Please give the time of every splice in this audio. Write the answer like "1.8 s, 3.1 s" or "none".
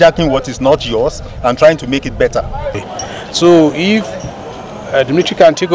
2.8 s

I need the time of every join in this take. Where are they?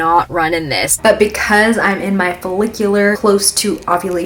1.0 s, 3.2 s

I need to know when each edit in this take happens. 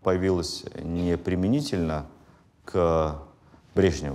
none

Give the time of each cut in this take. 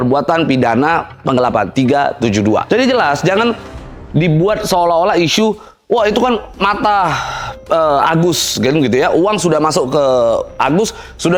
none

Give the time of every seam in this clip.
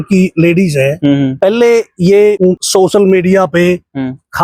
1.3 s, 2.5 s

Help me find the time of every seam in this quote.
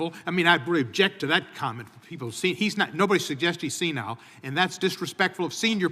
none

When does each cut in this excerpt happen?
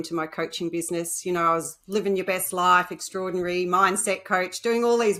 none

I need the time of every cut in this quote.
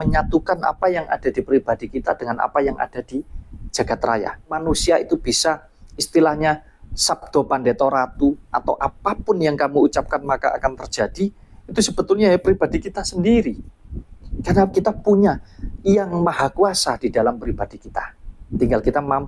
4.5 s

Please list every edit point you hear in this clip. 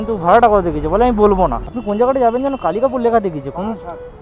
1.6 s

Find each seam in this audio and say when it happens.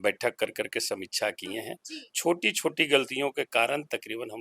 1.8 s

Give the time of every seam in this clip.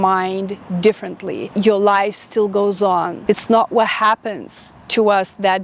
1.5 s, 3.1 s

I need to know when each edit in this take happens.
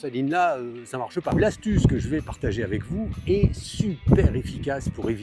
1.3 s

